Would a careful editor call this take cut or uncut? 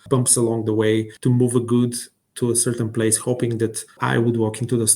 cut